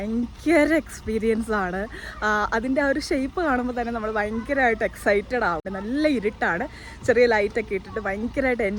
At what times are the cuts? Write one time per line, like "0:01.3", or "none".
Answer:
0:05.7